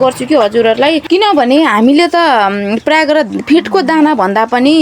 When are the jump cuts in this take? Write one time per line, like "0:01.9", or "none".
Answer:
0:01.0